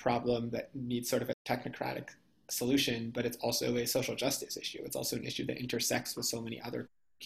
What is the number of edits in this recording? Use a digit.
1